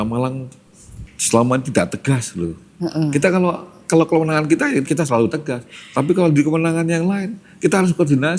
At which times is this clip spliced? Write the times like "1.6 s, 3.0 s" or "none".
4.8 s